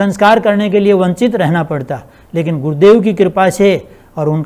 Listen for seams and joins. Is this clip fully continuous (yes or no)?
yes